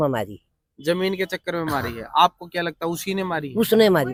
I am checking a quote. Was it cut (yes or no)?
no